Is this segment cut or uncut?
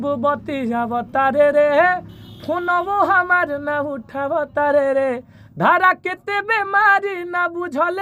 uncut